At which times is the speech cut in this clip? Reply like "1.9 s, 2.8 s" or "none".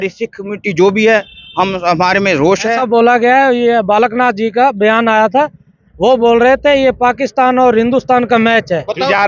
2.8 s